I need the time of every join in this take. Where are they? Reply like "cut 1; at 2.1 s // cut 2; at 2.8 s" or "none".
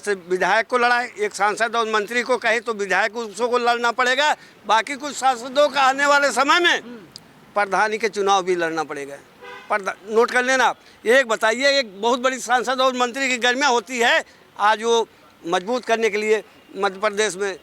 none